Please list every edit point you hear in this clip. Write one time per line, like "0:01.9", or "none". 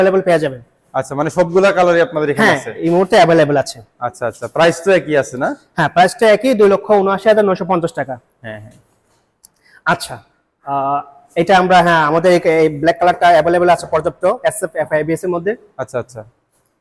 none